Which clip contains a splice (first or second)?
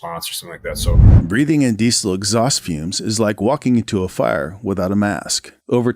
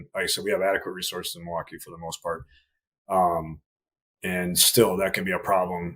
first